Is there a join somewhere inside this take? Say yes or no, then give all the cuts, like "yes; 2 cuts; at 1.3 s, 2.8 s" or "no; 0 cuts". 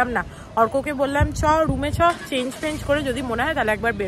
no; 0 cuts